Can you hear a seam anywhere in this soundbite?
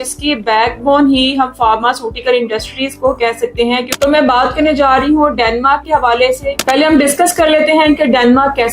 yes; 2 cuts; at 3.9 s, 6.6 s

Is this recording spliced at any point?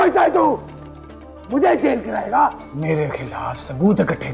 yes; 1 cut; at 2.7 s

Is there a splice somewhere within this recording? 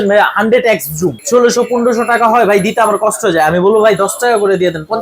yes; 1 cut; at 1.2 s

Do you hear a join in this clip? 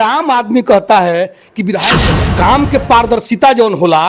yes; 1 cut; at 1.9 s

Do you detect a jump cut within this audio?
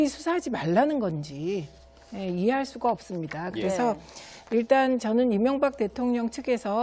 no; 0 cuts

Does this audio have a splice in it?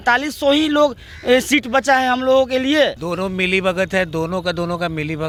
no; 0 cuts

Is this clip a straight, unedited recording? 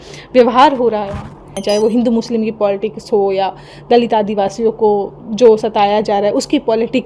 no; 1 cut; at 1.5 s

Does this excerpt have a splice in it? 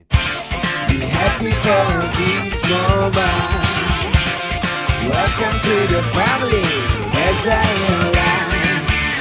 no; 0 cuts

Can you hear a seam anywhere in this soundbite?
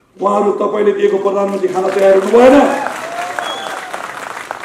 no; 0 cuts

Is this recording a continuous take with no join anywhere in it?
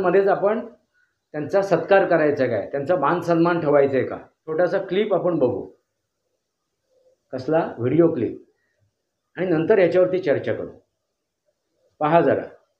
no; 1 cut; at 4.4 s

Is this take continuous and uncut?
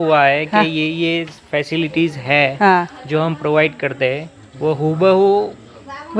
yes; 0 cuts

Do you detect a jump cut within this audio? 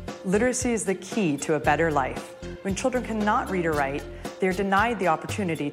no; 0 cuts

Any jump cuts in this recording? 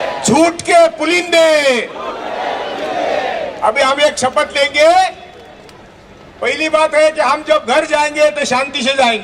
no; 0 cuts

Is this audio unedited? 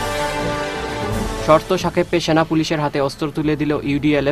no; 1 cut; at 1.1 s

